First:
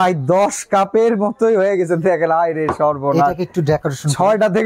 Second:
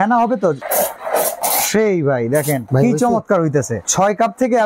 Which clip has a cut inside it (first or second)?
second